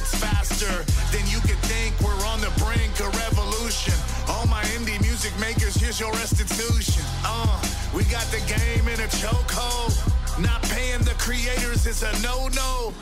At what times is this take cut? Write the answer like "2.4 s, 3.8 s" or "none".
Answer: none